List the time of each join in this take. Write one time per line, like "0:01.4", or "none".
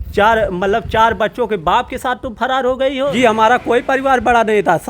0:03.1